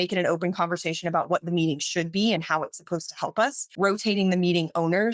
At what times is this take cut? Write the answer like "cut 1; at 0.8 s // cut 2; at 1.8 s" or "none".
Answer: cut 1; at 3.6 s